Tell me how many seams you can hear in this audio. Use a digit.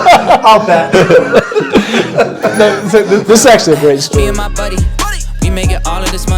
1